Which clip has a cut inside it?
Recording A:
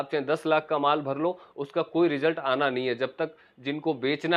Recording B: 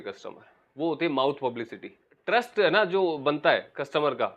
B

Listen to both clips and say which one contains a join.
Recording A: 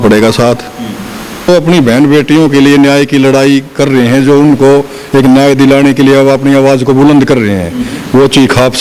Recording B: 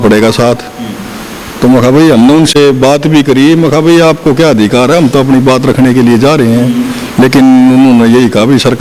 A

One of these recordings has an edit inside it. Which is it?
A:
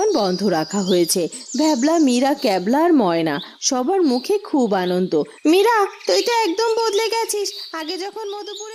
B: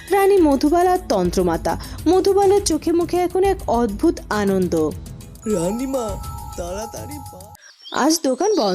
B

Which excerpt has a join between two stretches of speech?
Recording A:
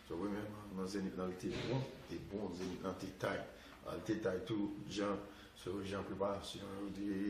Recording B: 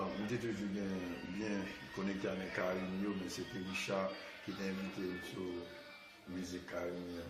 B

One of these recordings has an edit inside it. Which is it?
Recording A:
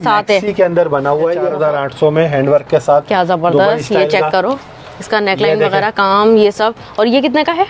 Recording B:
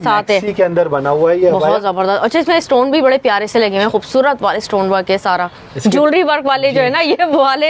A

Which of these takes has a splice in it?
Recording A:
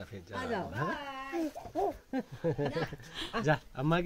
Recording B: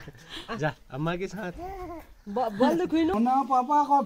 B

